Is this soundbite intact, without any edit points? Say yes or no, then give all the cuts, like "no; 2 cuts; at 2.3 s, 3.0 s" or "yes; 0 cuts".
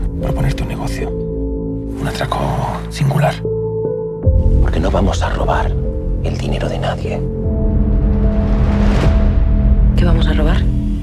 yes; 0 cuts